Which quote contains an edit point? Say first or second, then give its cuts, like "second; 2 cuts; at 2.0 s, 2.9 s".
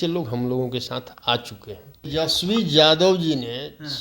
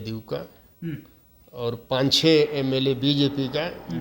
first; 1 cut; at 2.0 s